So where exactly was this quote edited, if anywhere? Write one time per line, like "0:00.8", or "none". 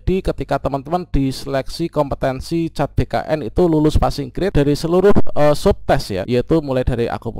0:04.5
0:06.2